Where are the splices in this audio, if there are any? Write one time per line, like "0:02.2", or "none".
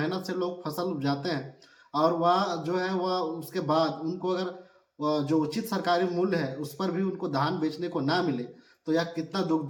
none